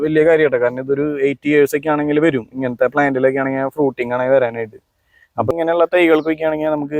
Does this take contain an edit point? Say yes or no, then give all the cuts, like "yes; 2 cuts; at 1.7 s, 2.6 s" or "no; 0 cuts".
yes; 1 cut; at 5.5 s